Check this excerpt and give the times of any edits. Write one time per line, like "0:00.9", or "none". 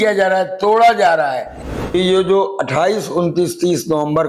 0:01.9